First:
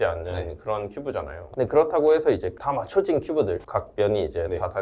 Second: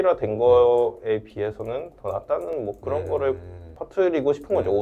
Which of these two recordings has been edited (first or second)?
first